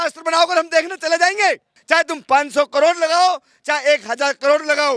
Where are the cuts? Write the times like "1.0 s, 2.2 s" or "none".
1.7 s

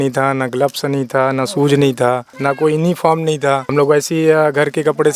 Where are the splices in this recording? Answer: 2.3 s, 3.7 s

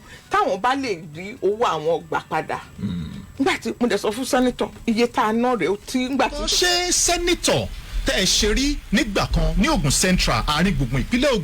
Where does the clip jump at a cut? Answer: 6.5 s

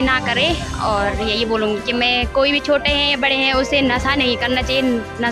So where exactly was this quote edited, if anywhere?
none

